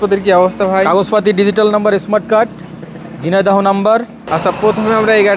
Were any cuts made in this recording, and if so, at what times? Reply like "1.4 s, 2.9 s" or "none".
4.2 s